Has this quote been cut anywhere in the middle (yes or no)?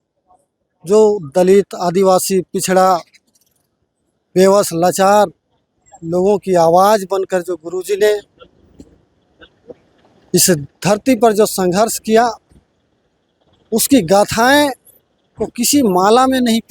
no